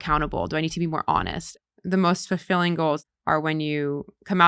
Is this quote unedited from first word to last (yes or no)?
no